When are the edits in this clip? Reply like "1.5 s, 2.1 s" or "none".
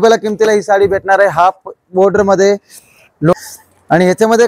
3.3 s